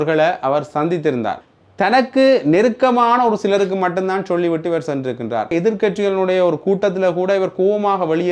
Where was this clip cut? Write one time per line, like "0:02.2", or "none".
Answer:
0:01.4
0:05.5